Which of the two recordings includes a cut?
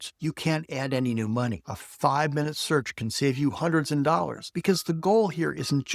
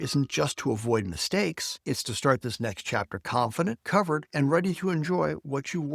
first; 2 cuts; at 1.6 s, 4.4 s

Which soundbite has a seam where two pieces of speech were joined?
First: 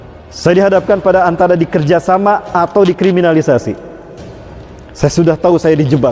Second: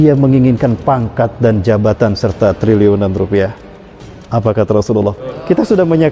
second; 1 cut; at 5.2 s

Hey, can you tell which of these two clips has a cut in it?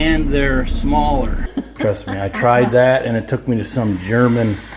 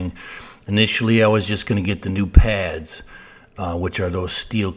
first; 1 cut; at 1.4 s

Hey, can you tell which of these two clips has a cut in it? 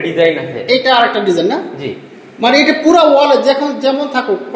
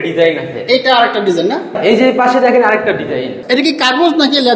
second; 2 cuts; at 1.7 s, 3.4 s

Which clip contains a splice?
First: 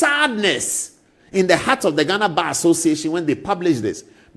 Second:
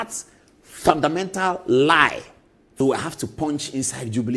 second; 1 cut; at 2.8 s

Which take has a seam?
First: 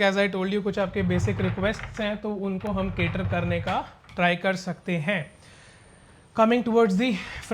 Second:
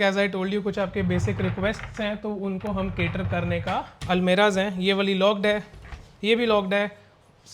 second; 1 cut; at 3.9 s

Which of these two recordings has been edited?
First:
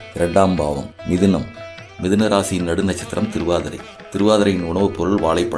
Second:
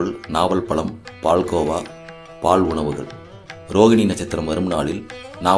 first; 1 cut; at 0.9 s

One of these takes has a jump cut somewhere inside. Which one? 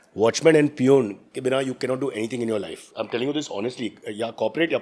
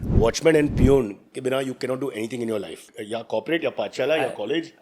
second; 1 cut; at 2.9 s

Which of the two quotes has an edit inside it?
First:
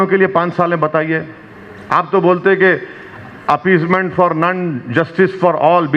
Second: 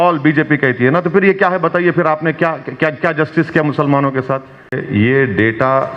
second; 1 cut; at 4.8 s

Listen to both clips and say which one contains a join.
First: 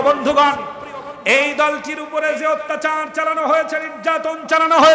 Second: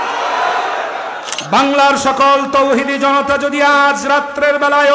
second; 1 cut; at 1.3 s

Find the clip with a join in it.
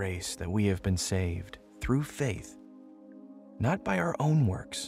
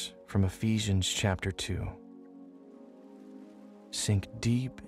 second; 2 cuts; at 2.1 s, 3.6 s

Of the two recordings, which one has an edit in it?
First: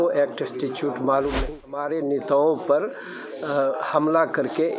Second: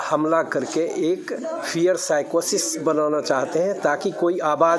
first; 1 cut; at 1.7 s

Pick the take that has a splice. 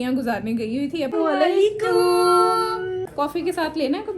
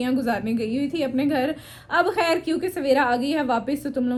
first; 2 cuts; at 1.1 s, 3.0 s

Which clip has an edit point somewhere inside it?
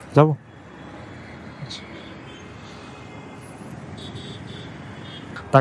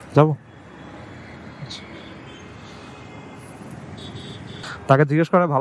second; 1 cut; at 4.7 s

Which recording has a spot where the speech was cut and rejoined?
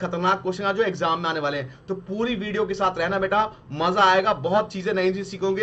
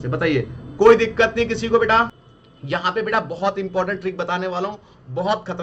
second; 1 cut; at 2.1 s

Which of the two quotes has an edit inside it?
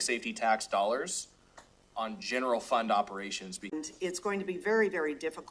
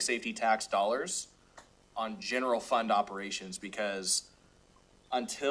first; 1 cut; at 3.7 s

